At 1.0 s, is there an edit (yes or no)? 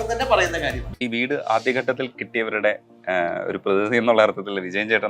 yes